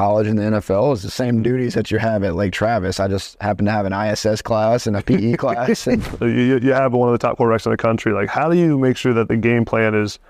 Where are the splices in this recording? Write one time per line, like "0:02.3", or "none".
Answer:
0:06.1

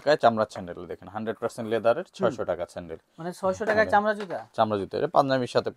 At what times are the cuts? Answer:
none

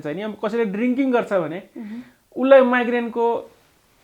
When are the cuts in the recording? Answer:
none

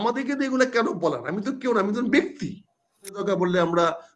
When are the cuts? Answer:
0:03.2

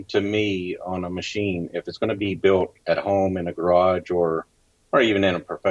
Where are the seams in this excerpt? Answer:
none

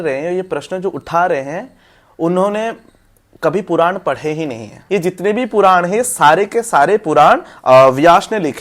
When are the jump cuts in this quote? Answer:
0:04.7

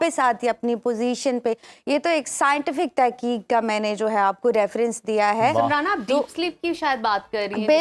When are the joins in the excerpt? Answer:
none

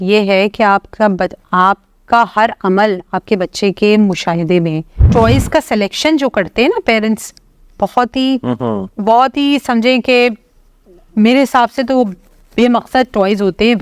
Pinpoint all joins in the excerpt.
0:05.0

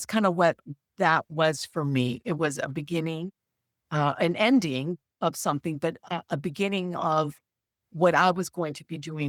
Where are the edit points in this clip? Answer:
none

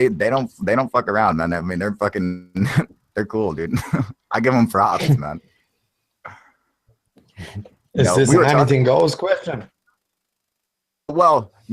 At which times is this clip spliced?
none

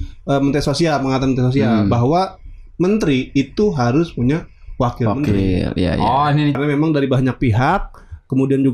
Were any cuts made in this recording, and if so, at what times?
0:06.6

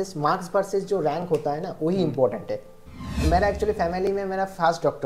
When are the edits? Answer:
0:03.2

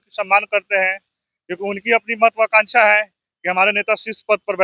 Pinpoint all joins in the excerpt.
none

